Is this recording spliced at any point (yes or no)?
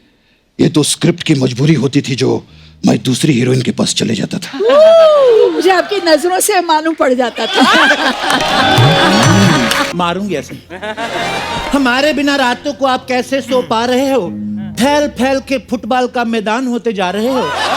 yes